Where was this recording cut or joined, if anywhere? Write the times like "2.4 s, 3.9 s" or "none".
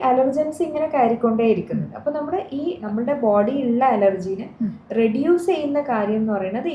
2.8 s